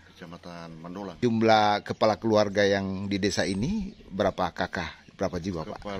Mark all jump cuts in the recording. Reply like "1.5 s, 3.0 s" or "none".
1.2 s